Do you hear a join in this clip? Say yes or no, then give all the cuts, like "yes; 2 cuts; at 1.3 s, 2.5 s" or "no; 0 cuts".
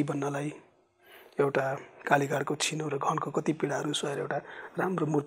no; 0 cuts